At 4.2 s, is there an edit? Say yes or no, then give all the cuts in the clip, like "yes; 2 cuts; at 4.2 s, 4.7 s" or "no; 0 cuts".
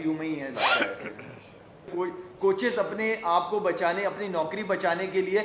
no; 1 cut; at 1.9 s